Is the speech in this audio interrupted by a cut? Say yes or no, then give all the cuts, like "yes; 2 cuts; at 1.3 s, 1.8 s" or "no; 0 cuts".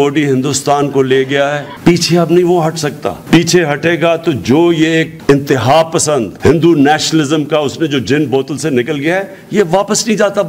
no; 0 cuts